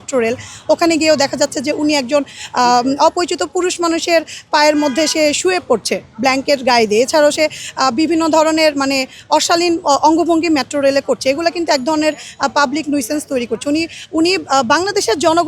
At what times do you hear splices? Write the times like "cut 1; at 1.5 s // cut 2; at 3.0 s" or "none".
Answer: none

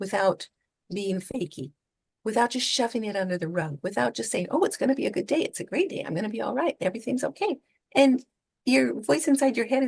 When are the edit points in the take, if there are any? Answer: none

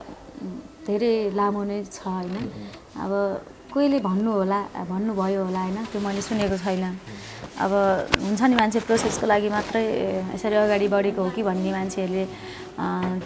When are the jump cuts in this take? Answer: none

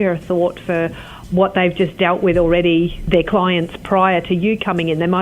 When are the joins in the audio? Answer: cut 1; at 1.1 s // cut 2; at 3.0 s

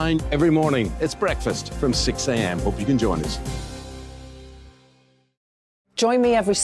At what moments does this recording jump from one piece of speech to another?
cut 1; at 5.6 s

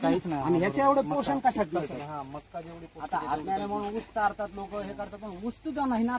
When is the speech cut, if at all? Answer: none

